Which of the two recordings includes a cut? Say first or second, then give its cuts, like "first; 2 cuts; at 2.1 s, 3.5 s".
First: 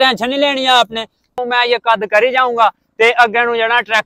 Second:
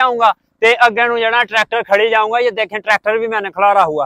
first; 1 cut; at 1.4 s